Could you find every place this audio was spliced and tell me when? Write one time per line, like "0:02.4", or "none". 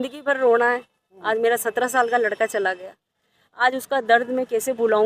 none